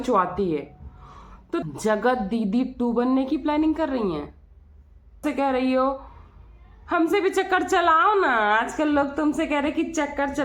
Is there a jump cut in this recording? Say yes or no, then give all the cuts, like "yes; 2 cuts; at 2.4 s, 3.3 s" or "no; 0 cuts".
yes; 2 cuts; at 1.6 s, 5.2 s